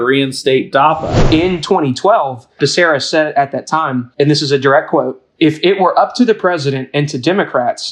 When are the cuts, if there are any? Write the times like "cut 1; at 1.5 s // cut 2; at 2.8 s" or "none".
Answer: cut 1; at 1.1 s // cut 2; at 2.6 s // cut 3; at 4.1 s // cut 4; at 5.2 s